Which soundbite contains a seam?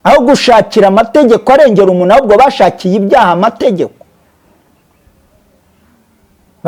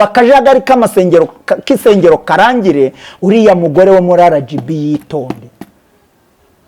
second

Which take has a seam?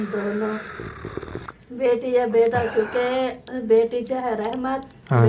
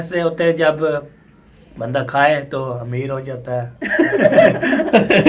second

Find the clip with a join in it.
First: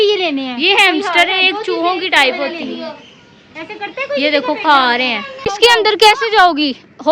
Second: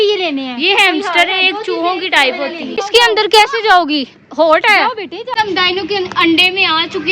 second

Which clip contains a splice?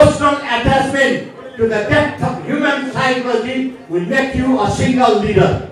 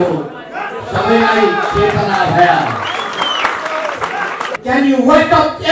second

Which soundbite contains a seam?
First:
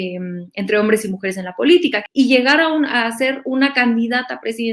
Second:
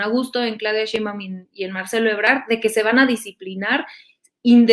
first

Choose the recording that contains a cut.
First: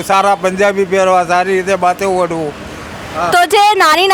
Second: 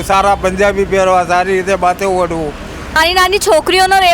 second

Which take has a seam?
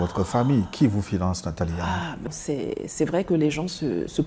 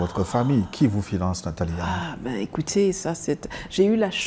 first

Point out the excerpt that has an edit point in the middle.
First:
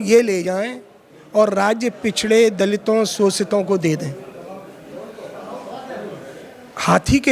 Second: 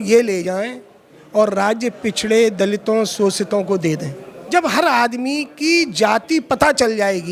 second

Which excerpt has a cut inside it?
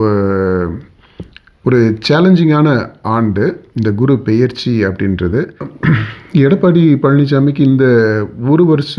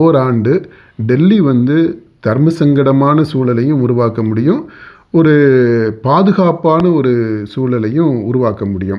first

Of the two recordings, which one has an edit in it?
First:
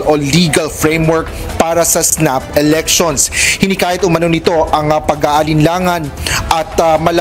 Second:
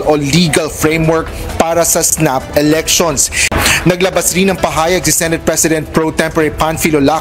second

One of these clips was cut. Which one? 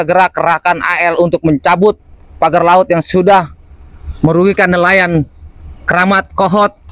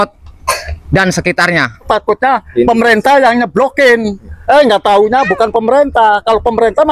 second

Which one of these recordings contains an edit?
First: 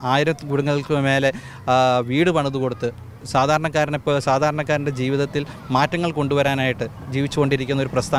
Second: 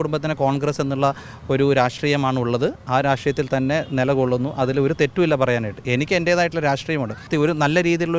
second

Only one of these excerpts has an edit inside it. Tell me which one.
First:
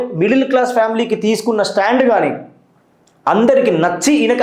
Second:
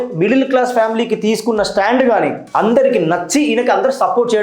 second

